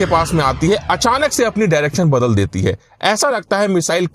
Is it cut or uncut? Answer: uncut